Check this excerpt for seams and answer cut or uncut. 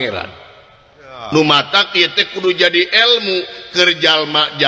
uncut